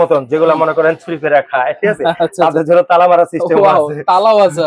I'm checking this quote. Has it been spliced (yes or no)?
no